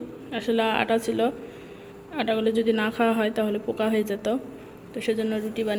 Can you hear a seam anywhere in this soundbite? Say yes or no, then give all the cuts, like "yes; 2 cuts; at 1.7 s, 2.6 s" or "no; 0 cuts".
no; 0 cuts